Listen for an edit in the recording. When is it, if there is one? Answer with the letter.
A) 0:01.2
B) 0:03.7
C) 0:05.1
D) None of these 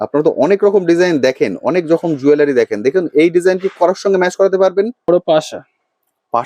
C